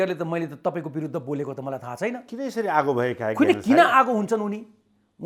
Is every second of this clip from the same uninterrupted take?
yes; 0 cuts

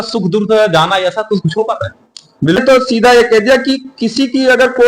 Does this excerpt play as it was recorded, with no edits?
no; 1 cut; at 2.6 s

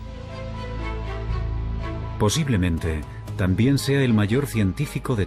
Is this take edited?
yes; 1 cut; at 2.3 s

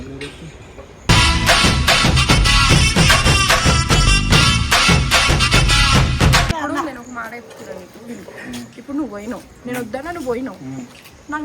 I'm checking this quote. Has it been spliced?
yes; 1 cut; at 6.5 s

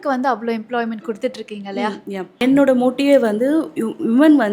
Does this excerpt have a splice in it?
yes; 1 cut; at 2.4 s

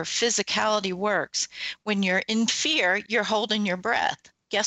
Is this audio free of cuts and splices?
yes; 0 cuts

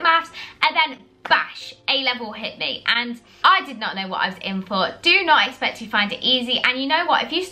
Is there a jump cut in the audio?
no; 0 cuts

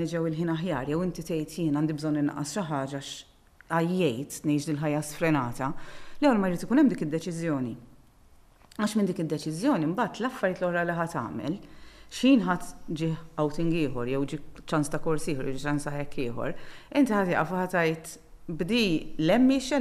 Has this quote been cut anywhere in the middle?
no; 0 cuts

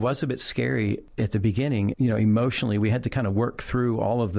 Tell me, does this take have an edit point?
yes; 1 cut; at 1.1 s

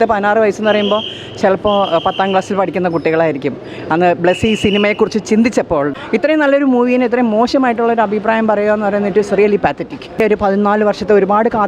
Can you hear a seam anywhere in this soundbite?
yes; 2 cuts; at 6.0 s, 10.2 s

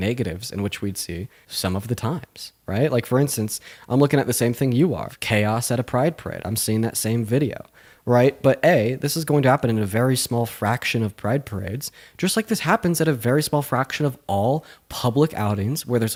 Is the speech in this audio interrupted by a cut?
no; 0 cuts

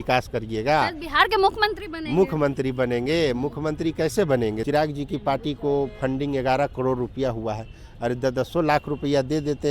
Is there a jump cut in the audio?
yes; 1 cut; at 4.6 s

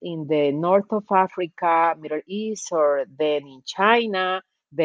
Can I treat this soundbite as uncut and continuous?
yes; 0 cuts

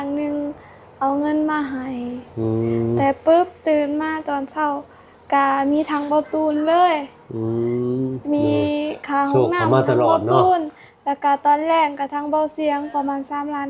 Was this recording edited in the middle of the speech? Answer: no; 0 cuts

